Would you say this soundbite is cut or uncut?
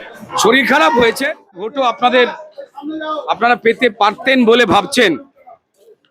cut